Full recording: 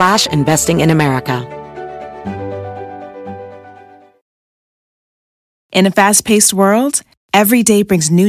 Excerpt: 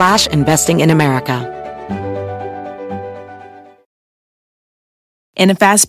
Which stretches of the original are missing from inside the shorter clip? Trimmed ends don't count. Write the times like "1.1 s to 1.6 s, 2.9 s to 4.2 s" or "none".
1.4 s to 1.8 s